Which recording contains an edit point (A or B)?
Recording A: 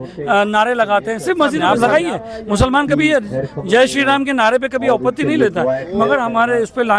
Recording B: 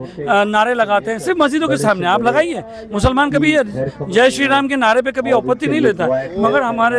A